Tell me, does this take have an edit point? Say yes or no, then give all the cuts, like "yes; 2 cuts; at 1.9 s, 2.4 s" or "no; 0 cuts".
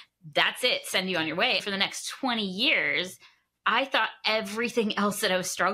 yes; 1 cut; at 1.6 s